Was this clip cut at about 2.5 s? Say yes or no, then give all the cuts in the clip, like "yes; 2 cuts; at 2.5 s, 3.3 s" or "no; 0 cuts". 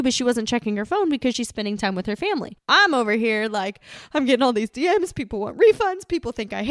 yes; 1 cut; at 2.5 s